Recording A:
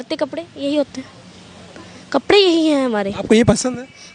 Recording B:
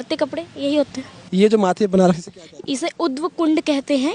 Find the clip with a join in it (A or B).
B